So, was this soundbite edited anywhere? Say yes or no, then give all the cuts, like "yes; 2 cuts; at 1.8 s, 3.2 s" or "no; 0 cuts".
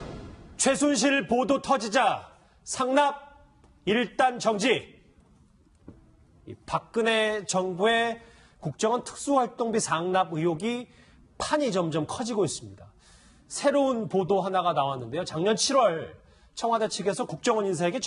no; 0 cuts